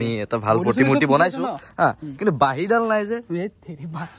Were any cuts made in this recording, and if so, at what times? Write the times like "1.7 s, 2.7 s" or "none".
none